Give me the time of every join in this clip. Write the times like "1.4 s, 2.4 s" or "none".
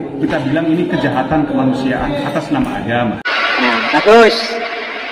3.2 s